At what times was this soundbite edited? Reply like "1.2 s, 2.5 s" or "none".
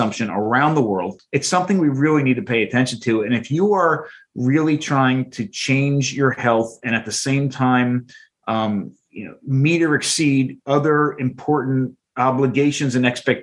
1.4 s